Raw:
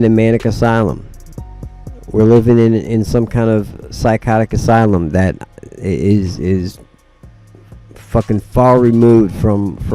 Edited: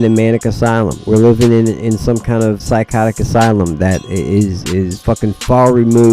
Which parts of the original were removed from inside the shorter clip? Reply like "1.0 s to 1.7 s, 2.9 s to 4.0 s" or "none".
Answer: 1.0 s to 2.0 s, 3.7 s to 3.9 s, 5.4 s to 5.8 s, 6.7 s to 8.0 s